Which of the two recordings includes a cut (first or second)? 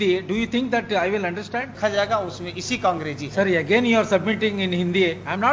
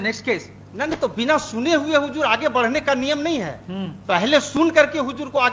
first